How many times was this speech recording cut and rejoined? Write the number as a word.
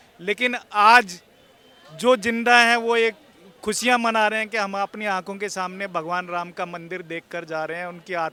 zero